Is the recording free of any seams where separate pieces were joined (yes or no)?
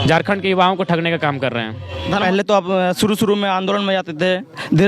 no